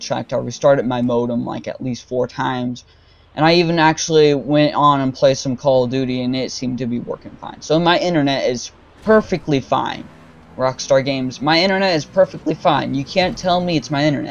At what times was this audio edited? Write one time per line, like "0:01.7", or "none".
none